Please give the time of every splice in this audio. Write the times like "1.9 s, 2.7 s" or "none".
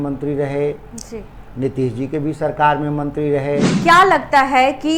3.7 s